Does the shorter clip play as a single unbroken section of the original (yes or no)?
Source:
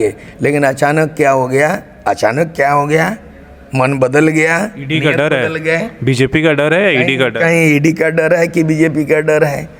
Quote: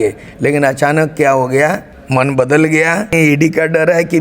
no